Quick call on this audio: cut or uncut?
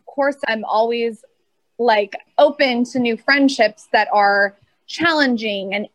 uncut